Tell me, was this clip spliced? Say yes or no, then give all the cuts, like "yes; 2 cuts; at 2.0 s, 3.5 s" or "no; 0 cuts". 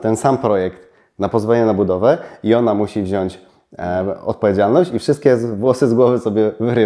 no; 0 cuts